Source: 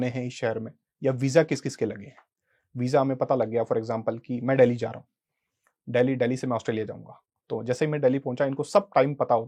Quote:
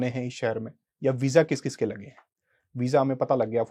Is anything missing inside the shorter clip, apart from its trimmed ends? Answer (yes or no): no